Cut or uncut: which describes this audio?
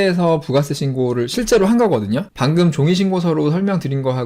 cut